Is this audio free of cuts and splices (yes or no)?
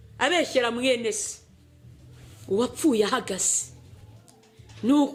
yes